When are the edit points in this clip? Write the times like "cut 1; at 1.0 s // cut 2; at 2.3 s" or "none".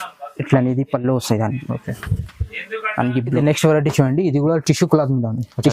cut 1; at 3.4 s